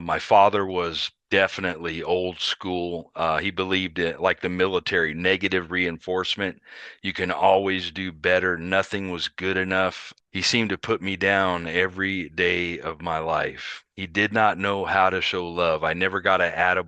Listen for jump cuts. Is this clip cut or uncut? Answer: cut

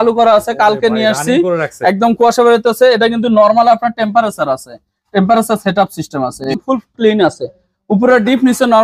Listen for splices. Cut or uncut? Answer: cut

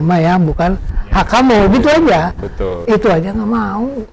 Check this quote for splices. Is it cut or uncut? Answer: uncut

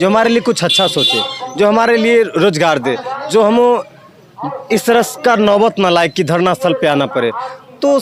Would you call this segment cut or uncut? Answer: uncut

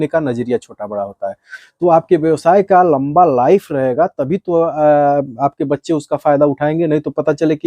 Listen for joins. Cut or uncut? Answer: cut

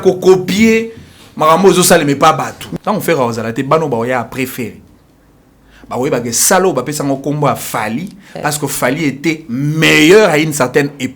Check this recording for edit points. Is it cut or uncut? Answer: cut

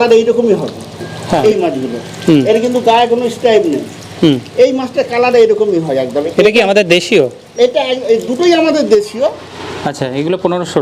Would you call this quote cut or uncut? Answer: cut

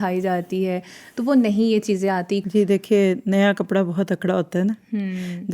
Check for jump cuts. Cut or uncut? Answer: cut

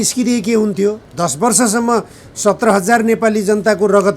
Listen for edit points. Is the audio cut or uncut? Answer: cut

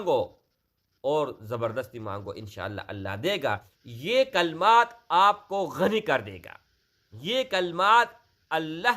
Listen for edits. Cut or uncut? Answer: cut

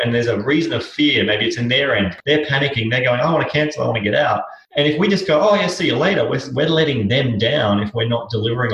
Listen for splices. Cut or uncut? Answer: cut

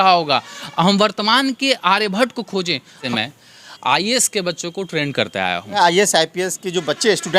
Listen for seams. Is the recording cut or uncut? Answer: cut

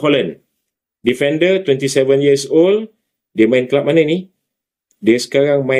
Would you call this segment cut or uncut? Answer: uncut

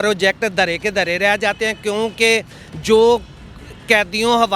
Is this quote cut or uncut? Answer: uncut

